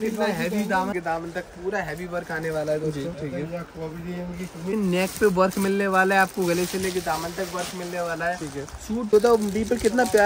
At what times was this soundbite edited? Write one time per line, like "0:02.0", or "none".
0:00.9
0:04.7
0:09.1